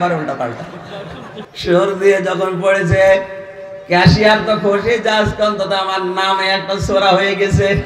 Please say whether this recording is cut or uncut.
cut